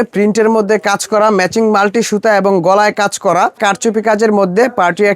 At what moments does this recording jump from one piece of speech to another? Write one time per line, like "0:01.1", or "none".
0:03.6